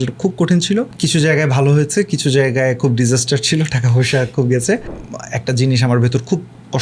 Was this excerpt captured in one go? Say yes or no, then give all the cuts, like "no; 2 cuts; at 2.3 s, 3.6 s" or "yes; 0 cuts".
no; 2 cuts; at 0.9 s, 4.9 s